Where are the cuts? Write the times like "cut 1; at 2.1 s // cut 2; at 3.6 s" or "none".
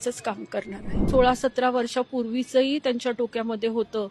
cut 1; at 1.1 s